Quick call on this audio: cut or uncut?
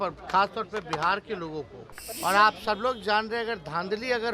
cut